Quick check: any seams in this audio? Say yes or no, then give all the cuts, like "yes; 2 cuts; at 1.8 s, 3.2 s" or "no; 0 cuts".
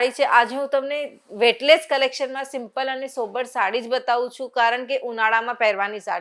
no; 0 cuts